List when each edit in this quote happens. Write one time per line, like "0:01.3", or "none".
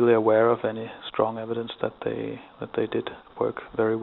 none